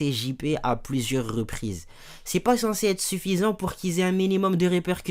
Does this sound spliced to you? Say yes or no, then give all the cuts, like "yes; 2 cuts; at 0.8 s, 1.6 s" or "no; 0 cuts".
no; 0 cuts